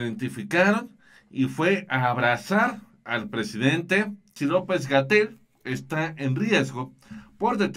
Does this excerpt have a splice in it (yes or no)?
yes